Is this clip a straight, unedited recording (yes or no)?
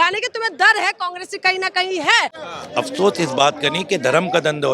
no